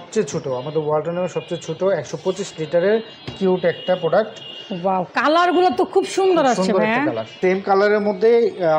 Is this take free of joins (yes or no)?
no